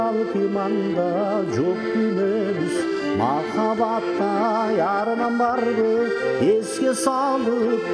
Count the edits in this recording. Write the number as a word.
zero